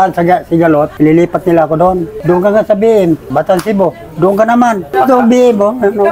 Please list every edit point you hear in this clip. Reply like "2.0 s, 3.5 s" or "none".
0.9 s, 3.3 s, 4.8 s

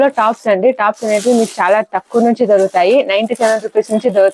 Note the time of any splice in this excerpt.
none

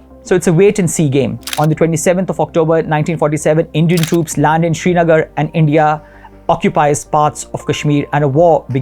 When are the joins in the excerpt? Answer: 1.4 s

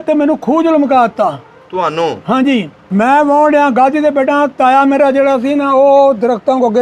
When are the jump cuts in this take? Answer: 2.8 s

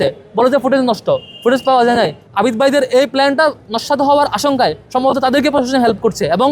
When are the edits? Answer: 2.2 s

